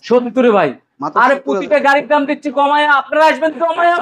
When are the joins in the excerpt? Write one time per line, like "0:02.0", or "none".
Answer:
none